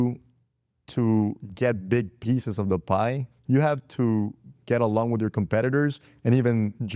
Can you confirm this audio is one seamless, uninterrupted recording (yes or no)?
yes